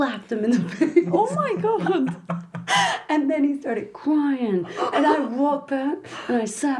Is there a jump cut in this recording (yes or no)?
no